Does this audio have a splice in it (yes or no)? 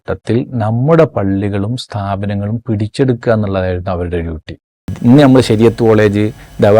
yes